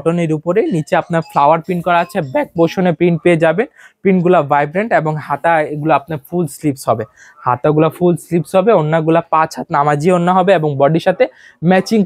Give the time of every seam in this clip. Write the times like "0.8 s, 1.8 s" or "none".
none

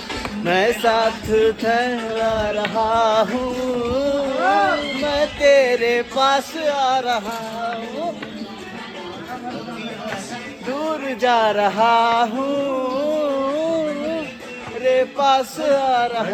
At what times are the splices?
none

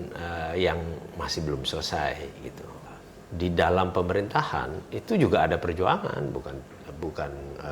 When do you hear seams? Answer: 2.7 s

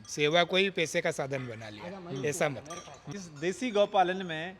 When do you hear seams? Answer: 3.0 s

